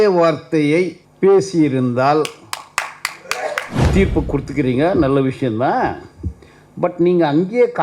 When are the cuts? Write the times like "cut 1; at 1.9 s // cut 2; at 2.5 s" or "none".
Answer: cut 1; at 1.0 s // cut 2; at 3.7 s